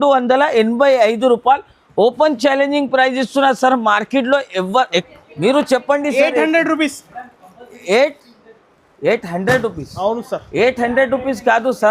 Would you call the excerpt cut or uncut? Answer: cut